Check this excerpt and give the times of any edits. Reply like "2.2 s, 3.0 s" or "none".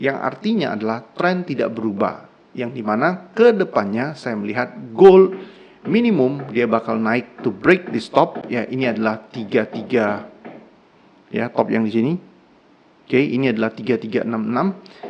none